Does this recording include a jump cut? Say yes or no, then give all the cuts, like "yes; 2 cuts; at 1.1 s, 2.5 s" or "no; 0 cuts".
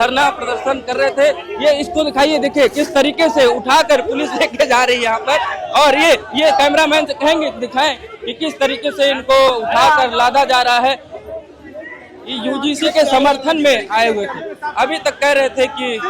no; 0 cuts